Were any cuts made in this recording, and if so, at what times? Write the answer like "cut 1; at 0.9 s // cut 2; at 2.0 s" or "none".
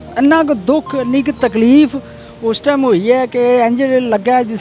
none